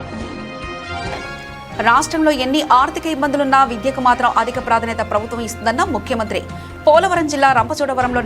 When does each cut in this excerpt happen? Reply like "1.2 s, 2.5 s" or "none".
1.1 s